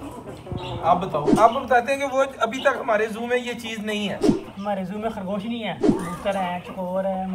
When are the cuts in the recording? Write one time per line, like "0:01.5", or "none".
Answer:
0:01.3
0:05.9